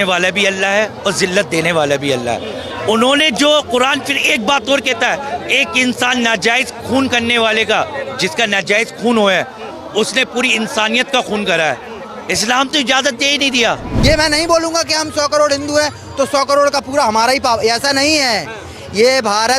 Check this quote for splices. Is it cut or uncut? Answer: cut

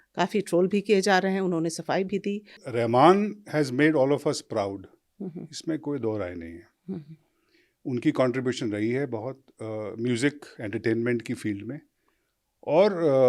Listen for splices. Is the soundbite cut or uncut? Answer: cut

